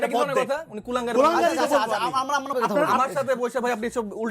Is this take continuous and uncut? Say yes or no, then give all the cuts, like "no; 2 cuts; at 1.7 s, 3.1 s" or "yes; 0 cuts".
no; 1 cut; at 2.5 s